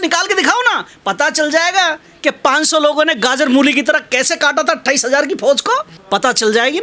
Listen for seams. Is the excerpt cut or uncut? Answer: uncut